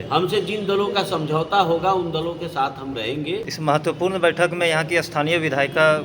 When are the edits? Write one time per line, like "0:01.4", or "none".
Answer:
0:03.5